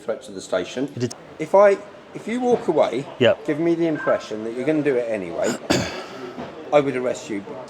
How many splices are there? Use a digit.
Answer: 1